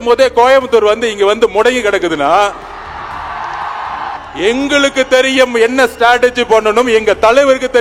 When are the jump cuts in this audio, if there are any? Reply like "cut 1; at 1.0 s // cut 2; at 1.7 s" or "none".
cut 1; at 4.2 s